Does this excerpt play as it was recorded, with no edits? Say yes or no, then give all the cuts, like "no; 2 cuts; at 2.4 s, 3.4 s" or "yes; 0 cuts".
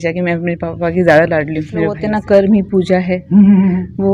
no; 1 cut; at 2.0 s